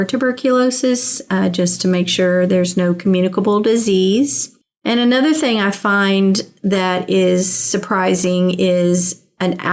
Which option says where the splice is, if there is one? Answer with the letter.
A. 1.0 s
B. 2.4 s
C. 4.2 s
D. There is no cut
D